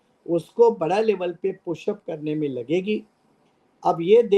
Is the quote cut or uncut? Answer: uncut